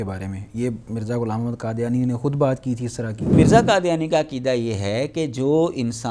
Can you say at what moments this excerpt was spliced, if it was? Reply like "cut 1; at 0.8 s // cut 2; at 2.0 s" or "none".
cut 1; at 3.3 s